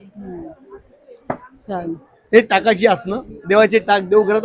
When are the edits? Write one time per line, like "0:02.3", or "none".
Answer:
none